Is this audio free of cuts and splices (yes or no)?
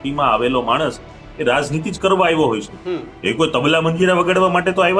yes